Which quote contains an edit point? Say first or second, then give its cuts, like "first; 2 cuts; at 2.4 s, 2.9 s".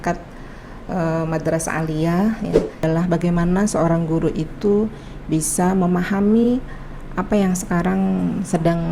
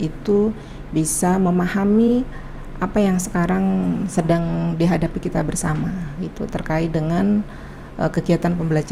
first; 1 cut; at 2.8 s